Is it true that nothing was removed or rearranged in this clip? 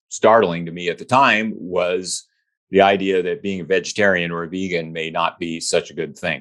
yes; 0 cuts

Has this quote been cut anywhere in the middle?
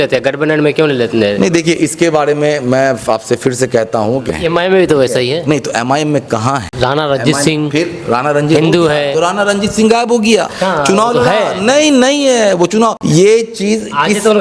yes; 4 cuts; at 4.3 s, 6.7 s, 10.5 s, 13.0 s

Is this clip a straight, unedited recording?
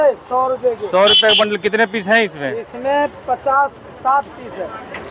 yes; 0 cuts

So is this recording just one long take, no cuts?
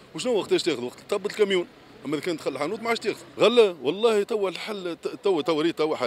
no; 1 cut; at 3.3 s

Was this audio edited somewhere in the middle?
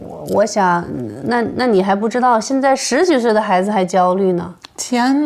no; 0 cuts

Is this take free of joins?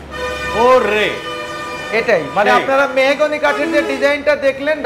yes; 0 cuts

